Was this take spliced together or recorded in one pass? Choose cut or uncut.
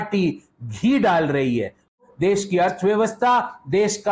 cut